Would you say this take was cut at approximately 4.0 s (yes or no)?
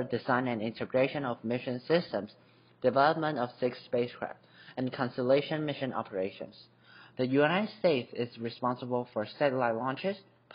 no